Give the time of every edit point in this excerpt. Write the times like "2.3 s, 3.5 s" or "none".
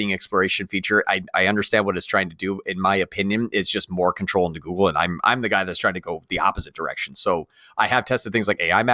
none